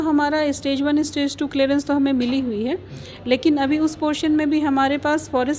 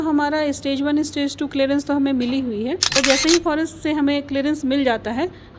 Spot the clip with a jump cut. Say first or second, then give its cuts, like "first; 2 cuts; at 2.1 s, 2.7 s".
second; 1 cut; at 2.9 s